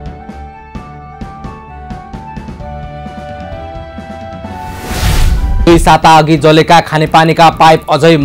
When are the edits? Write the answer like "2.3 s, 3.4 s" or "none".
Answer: 3.3 s